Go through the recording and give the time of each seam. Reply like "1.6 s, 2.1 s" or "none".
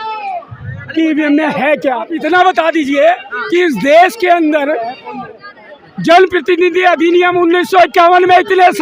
2.1 s